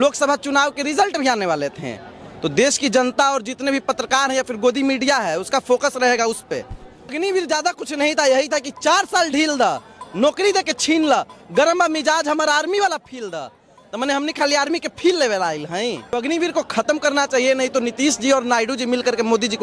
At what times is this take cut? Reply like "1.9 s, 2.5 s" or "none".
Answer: 7.1 s, 16.1 s